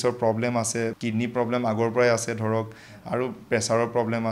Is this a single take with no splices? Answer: no; 1 cut; at 0.9 s

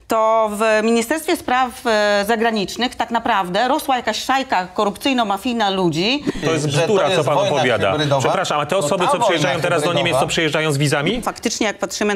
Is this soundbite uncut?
no; 2 cuts; at 6.4 s, 11.2 s

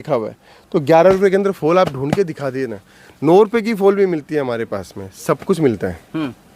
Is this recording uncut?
yes; 0 cuts

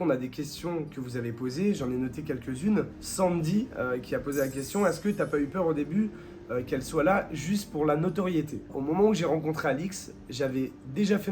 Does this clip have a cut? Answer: no; 0 cuts

